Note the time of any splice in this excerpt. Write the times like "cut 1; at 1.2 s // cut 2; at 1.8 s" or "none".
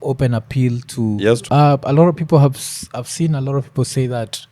cut 1; at 1.4 s